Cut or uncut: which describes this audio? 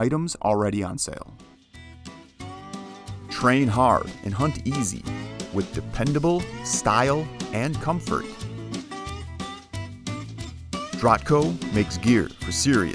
cut